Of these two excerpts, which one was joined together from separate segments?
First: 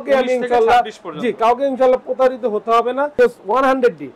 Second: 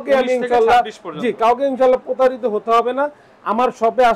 first; 1 cut; at 3.1 s

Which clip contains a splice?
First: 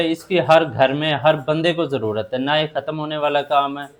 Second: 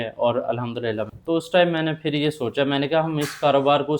second; 1 cut; at 1.1 s

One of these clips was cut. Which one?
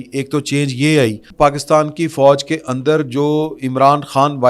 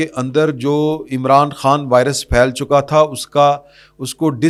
first; 1 cut; at 1.3 s

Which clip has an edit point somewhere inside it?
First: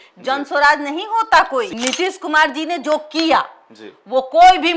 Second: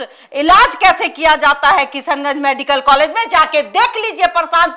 first; 1 cut; at 1.7 s

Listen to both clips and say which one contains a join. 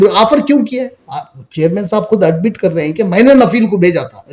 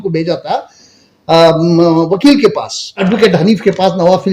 second; 1 cut; at 3.0 s

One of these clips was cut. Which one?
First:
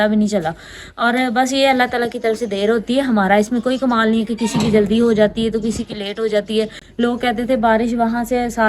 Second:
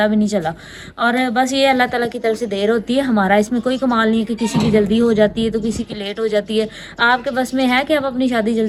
first; 1 cut; at 6.8 s

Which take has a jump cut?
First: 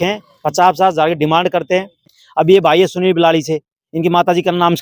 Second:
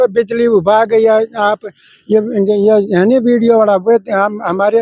first; 1 cut; at 2.2 s

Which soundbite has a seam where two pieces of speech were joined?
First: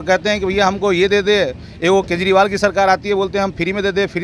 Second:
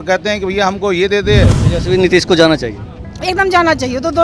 second; 1 cut; at 1.6 s

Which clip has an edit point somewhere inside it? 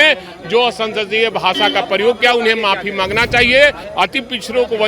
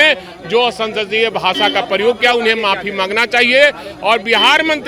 first; 1 cut; at 3.8 s

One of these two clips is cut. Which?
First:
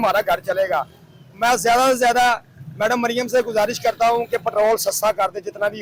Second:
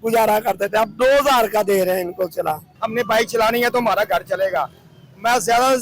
second; 1 cut; at 2.7 s

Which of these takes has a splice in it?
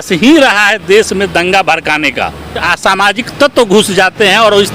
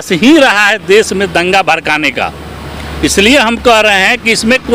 first; 1 cut; at 2.7 s

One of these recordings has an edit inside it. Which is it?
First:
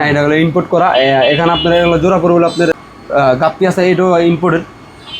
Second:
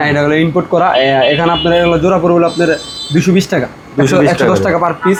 first; 1 cut; at 2.9 s

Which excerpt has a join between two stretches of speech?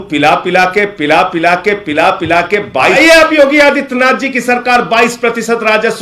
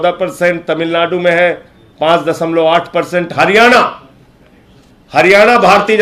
first; 1 cut; at 2.9 s

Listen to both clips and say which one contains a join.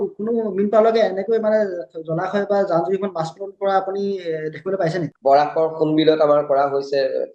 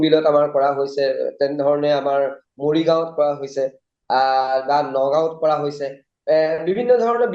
first; 1 cut; at 5.0 s

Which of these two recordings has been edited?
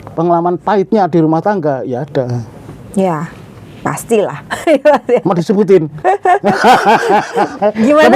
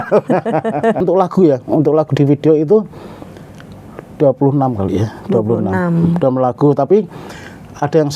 second; 1 cut; at 1.0 s

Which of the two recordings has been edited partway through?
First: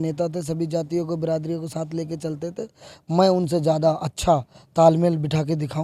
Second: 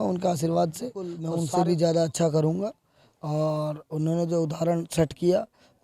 second; 1 cut; at 1.3 s

